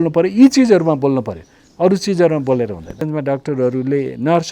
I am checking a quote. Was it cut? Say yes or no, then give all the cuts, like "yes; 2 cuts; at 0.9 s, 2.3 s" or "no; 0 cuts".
yes; 1 cut; at 3.0 s